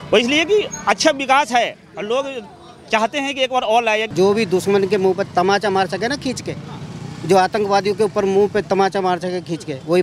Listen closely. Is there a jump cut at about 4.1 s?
yes; 1 cut; at 4.1 s

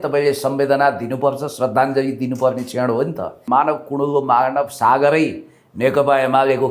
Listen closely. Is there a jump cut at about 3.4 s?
yes; 1 cut; at 3.4 s

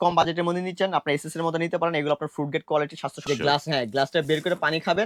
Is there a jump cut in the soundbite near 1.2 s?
no; 1 cut; at 3.2 s

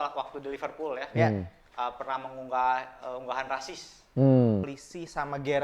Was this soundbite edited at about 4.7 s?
yes; 1 cut; at 4.7 s

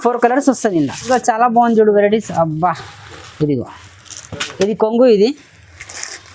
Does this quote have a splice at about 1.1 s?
yes; 1 cut; at 1.1 s

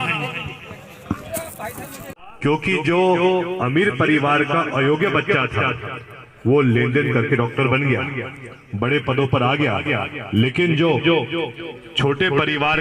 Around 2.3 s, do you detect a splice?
yes; 1 cut; at 2.3 s

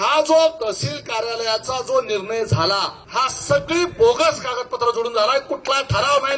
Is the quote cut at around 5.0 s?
no; 1 cut; at 3.0 s

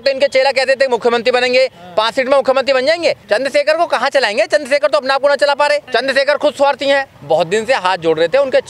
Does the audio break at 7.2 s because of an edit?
yes; 3 cuts; at 3.2 s, 5.9 s, 7.2 s

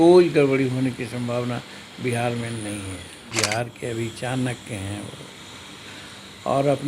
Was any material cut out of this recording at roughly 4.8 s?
no; 1 cut; at 3.2 s

